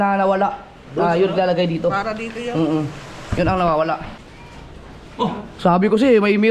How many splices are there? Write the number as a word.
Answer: one